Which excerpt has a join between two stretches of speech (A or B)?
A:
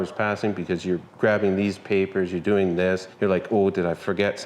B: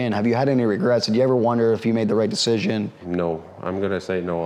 A